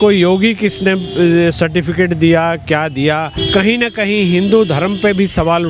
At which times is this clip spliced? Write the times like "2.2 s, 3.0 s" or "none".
3.3 s